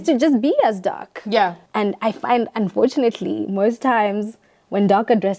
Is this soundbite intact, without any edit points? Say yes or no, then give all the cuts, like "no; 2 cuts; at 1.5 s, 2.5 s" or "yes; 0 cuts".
no; 1 cut; at 1.6 s